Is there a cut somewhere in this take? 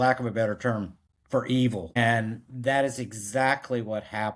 yes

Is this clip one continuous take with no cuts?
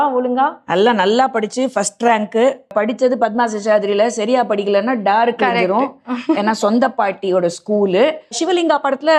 no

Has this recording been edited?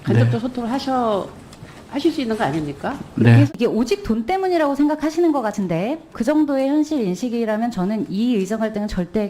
yes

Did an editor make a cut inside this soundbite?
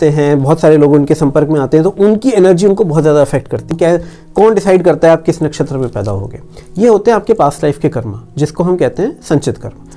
yes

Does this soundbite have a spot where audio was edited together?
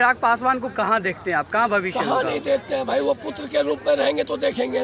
no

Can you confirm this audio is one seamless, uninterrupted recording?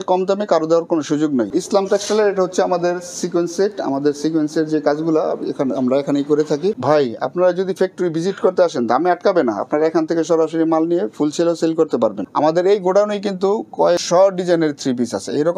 no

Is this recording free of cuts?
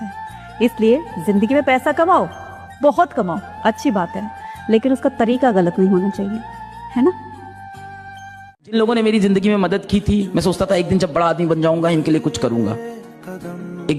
yes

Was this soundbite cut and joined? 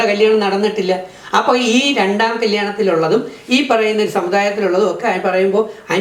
no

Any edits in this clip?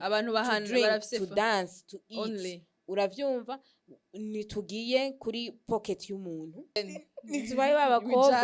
yes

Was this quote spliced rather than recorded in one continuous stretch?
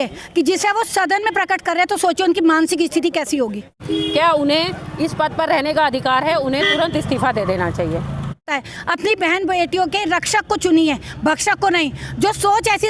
yes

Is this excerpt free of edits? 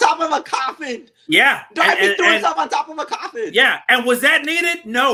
yes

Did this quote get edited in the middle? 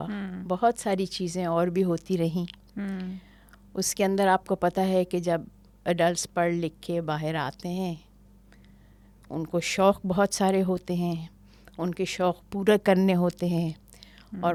no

